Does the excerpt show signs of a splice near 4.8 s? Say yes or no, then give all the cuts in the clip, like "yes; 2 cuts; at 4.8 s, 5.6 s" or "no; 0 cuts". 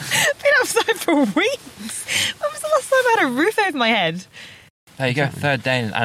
yes; 1 cut; at 4.8 s